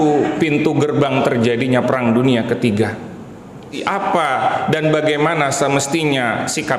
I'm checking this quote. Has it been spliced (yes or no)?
yes